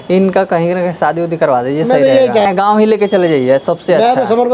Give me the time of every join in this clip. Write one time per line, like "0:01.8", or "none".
0:02.5